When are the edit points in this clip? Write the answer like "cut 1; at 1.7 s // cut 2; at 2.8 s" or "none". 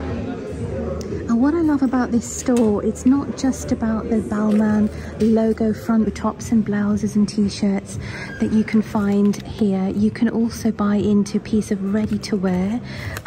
none